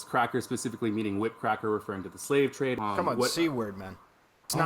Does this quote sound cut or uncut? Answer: cut